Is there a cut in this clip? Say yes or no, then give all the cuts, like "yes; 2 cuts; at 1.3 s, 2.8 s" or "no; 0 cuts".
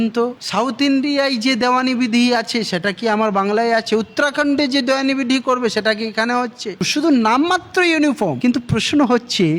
yes; 1 cut; at 6.9 s